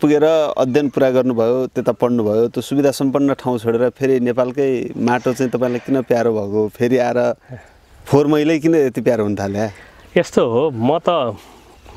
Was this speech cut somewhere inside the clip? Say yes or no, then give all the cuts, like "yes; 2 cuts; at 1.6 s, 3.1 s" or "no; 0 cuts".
no; 0 cuts